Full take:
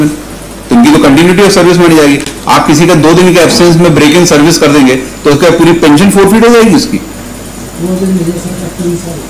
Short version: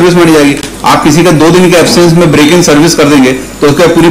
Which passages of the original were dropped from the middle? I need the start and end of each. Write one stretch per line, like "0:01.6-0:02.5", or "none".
none